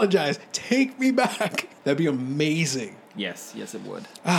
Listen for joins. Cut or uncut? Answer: cut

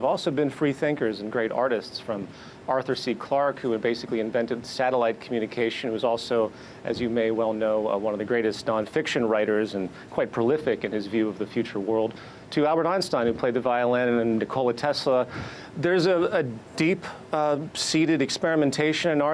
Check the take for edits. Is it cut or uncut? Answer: uncut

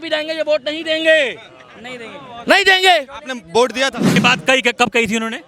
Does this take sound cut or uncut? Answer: cut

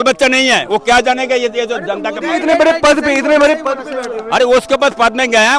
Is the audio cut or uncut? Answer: uncut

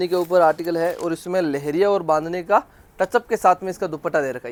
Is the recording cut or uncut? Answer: uncut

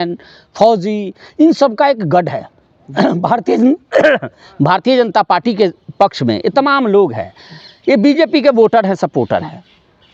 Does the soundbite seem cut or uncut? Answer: uncut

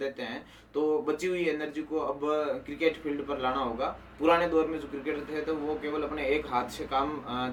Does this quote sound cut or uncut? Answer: uncut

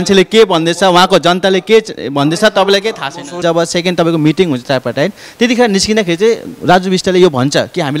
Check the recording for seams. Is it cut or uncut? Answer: cut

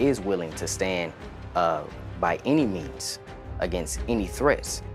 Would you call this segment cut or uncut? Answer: uncut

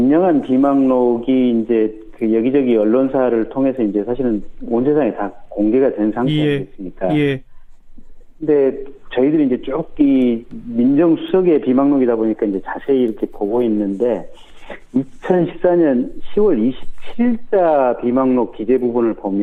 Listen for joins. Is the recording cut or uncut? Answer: uncut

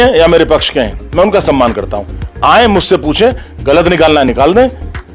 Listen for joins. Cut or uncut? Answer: uncut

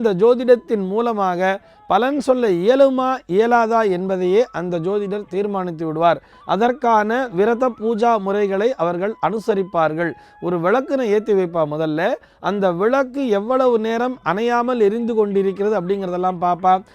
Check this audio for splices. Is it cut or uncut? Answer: uncut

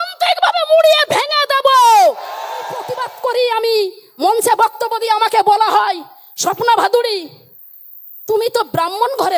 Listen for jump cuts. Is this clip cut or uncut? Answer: cut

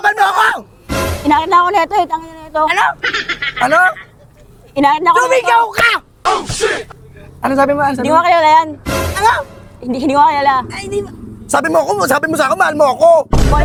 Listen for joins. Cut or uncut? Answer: uncut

